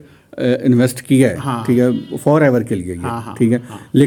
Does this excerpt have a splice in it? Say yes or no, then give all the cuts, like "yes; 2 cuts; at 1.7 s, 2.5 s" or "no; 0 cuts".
no; 0 cuts